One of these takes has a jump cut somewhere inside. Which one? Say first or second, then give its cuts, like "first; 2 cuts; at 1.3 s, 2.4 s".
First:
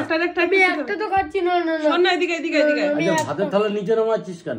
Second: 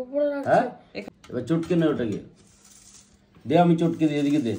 second; 1 cut; at 1.0 s